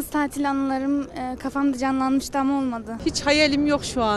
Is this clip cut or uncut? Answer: cut